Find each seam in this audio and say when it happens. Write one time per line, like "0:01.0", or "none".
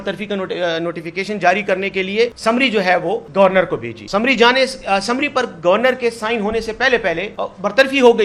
0:02.4
0:03.3
0:04.0
0:07.3